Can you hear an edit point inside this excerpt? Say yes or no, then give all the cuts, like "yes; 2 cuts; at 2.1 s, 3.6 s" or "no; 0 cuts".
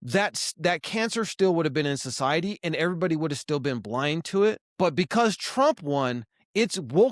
yes; 1 cut; at 4.7 s